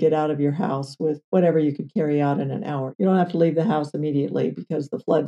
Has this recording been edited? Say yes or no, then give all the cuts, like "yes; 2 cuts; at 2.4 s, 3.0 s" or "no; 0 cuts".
yes; 2 cuts; at 1.2 s, 2.8 s